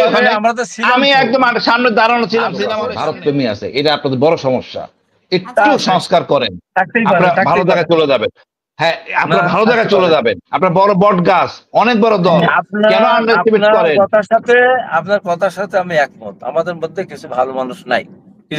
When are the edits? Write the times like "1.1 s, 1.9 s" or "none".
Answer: 2.9 s